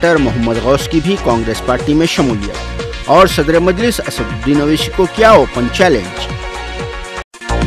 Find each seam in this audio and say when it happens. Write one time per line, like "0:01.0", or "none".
none

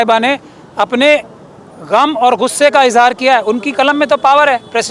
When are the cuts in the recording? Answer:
none

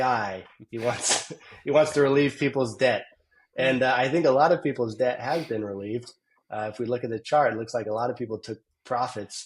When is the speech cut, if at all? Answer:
none

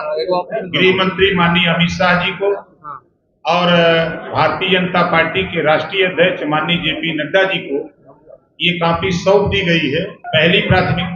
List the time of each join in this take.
0:10.2

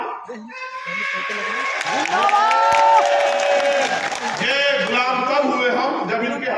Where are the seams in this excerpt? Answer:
none

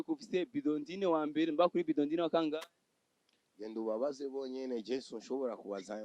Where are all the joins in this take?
none

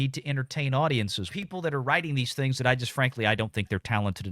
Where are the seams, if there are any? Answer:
0:01.3

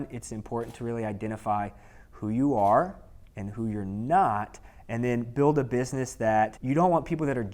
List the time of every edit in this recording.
0:06.6

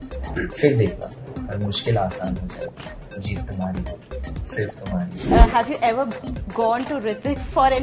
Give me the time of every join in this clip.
0:05.2

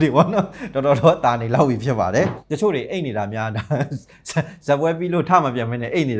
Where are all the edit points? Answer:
0:02.4

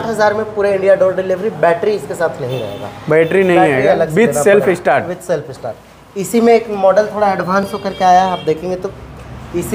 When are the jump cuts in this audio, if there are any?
none

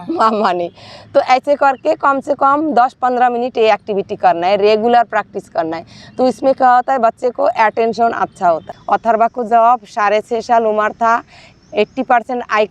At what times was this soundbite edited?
0:08.7

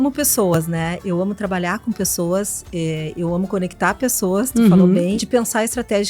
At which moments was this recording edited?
0:05.2

